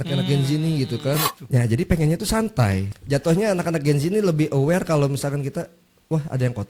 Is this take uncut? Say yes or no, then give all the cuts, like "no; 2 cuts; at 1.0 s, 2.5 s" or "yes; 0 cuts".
no; 1 cut; at 1.3 s